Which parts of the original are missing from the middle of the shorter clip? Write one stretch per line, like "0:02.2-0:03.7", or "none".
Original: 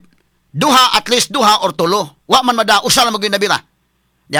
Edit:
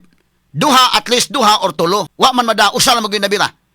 0:02.1-0:02.2